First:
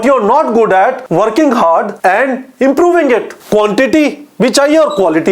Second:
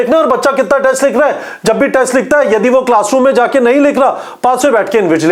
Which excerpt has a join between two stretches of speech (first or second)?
first